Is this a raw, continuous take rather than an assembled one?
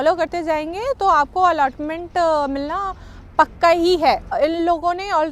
no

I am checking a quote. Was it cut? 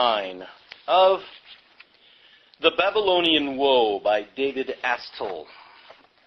no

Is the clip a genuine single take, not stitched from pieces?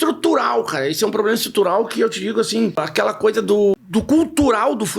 no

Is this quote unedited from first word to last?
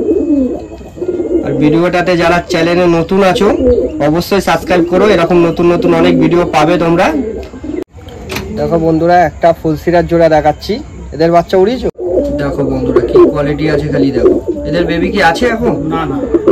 no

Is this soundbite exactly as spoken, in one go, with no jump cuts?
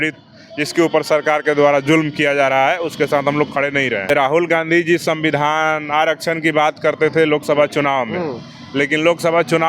no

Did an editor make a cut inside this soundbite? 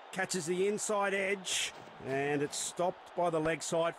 no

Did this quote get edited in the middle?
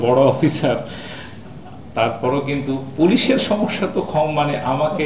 no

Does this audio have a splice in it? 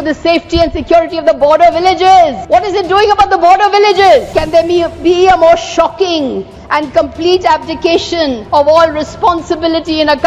yes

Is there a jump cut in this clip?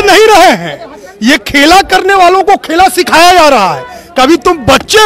no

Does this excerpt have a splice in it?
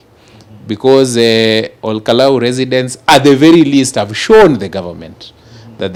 no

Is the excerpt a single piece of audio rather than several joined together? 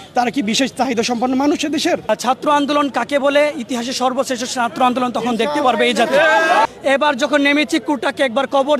no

